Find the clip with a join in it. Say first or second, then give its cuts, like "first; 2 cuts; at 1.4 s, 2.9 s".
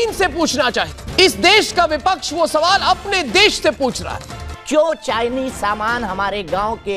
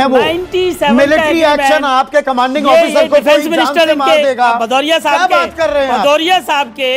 first; 2 cuts; at 1.0 s, 4.5 s